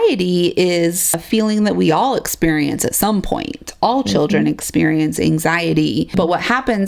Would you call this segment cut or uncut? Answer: cut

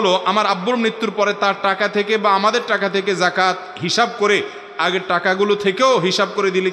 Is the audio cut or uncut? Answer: uncut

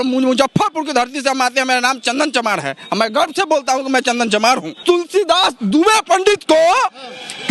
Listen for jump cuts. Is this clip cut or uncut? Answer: cut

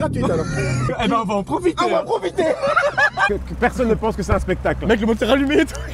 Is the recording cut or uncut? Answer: cut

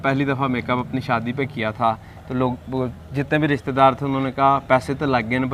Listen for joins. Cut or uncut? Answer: uncut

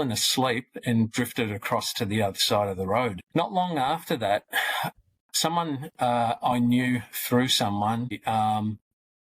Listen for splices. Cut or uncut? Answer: cut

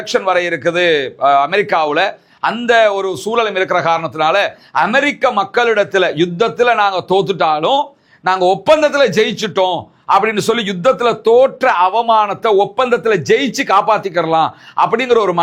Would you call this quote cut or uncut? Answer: uncut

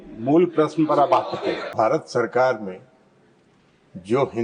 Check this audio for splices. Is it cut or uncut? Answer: cut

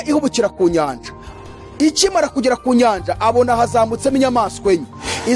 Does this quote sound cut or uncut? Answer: uncut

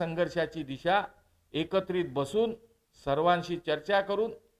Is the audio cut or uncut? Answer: uncut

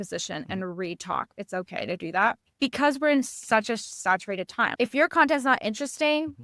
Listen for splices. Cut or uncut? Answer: cut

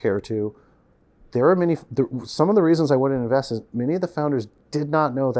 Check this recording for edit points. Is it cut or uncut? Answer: uncut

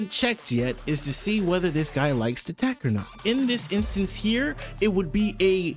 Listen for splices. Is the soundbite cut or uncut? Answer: cut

